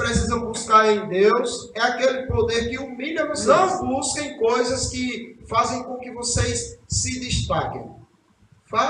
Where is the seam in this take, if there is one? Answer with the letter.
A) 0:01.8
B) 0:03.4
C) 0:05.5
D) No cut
B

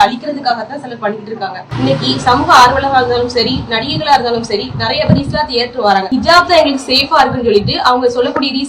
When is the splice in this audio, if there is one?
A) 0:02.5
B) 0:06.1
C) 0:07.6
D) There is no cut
B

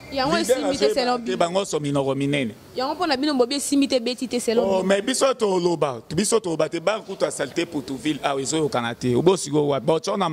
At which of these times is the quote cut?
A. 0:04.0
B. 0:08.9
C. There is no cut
C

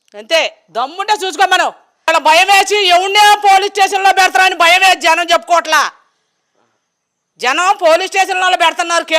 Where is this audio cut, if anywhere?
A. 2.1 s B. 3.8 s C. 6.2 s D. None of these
A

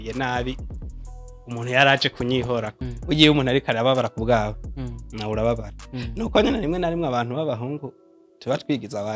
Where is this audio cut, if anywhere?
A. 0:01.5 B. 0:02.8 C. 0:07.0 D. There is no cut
B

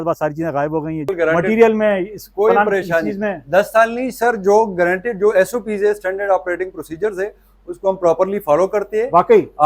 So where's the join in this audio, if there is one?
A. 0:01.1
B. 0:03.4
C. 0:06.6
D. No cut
A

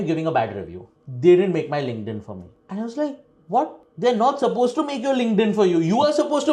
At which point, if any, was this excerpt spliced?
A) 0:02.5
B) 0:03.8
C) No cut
C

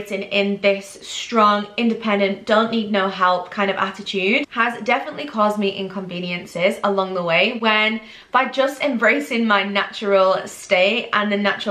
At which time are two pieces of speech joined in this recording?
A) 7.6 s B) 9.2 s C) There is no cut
C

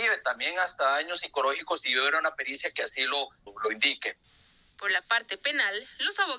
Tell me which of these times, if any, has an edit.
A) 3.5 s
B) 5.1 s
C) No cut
A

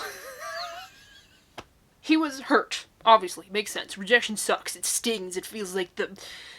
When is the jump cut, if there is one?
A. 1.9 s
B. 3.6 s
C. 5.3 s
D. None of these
A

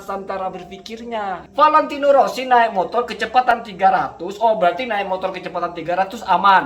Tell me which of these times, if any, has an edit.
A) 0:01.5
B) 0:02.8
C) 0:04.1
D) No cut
A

